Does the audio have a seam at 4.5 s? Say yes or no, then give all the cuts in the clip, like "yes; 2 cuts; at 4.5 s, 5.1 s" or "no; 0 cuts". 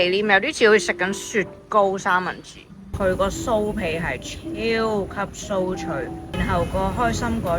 no; 2 cuts; at 2.8 s, 6.2 s